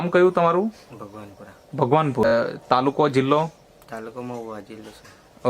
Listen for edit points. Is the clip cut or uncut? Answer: cut